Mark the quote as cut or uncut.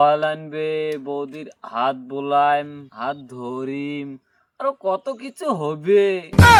uncut